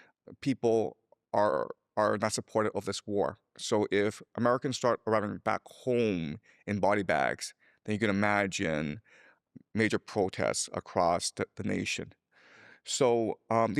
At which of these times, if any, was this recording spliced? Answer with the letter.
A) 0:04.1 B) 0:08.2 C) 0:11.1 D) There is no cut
D